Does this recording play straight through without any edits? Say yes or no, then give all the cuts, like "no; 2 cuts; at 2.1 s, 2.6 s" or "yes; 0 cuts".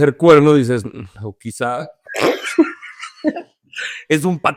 yes; 0 cuts